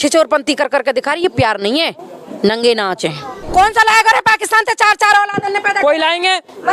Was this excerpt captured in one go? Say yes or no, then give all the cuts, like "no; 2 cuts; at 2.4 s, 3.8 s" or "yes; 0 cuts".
no; 1 cut; at 3.4 s